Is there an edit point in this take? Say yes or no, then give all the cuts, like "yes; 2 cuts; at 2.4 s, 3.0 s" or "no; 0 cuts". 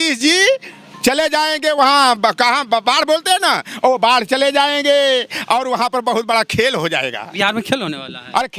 no; 0 cuts